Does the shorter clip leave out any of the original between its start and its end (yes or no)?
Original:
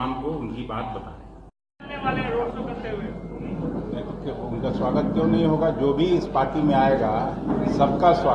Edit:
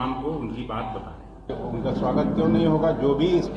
yes